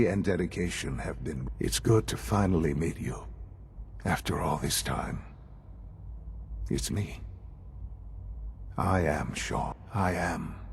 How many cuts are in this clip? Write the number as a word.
two